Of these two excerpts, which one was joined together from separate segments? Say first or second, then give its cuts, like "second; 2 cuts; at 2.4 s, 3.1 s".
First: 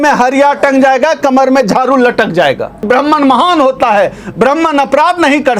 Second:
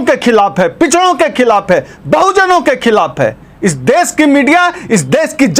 first; 1 cut; at 2.8 s